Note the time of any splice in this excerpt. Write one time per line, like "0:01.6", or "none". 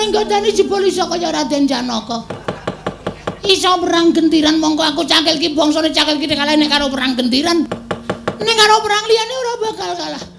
0:02.4
0:07.8